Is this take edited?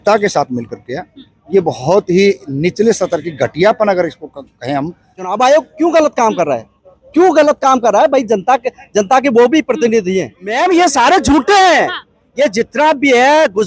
yes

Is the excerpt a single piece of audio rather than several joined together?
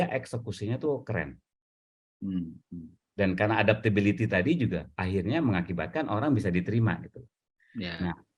yes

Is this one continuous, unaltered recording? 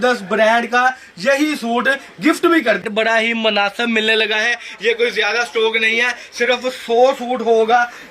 no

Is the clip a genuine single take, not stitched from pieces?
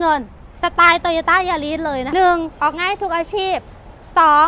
no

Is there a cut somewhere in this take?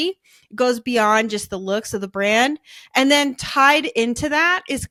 no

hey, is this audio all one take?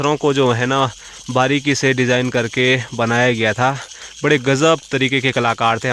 yes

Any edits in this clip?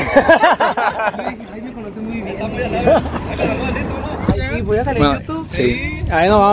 yes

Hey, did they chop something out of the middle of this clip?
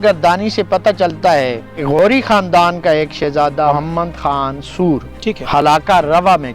yes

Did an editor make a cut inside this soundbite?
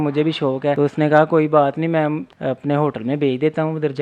yes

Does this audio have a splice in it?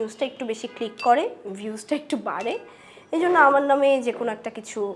no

